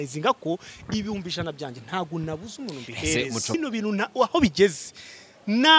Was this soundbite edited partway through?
yes; 1 cut; at 3.5 s

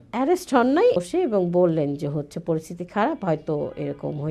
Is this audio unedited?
no; 1 cut; at 1.0 s

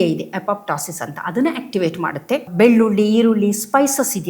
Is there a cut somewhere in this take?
yes; 1 cut; at 2.5 s

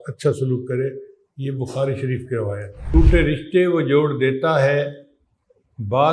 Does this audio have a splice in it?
yes; 1 cut; at 2.9 s

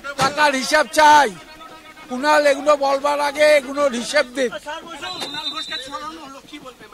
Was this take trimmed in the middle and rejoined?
no; 0 cuts

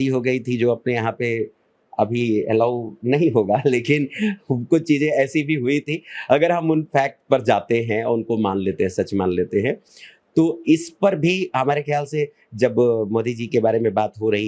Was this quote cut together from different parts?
no; 0 cuts

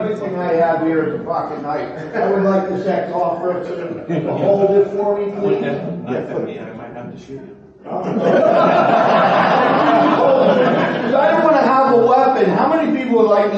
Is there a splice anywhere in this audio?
no; 0 cuts

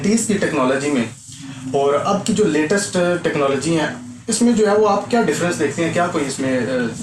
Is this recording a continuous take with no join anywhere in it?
yes; 0 cuts

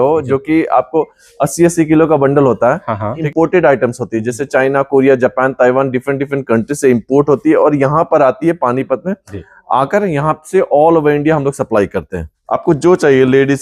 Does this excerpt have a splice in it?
yes; 2 cuts; at 3.2 s, 12.4 s

